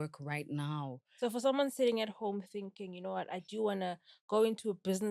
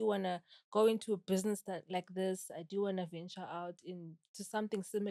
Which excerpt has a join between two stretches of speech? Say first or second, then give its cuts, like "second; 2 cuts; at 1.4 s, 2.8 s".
first; 1 cut; at 1.0 s